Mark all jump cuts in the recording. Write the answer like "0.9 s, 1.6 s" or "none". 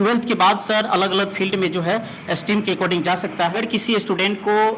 3.6 s